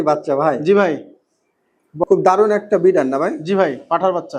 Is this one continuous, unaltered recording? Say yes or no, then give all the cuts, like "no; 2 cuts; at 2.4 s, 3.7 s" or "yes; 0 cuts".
no; 1 cut; at 2.0 s